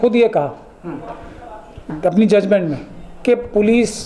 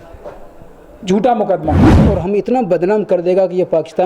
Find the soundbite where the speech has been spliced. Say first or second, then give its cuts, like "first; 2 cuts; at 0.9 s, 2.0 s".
second; 1 cut; at 1.9 s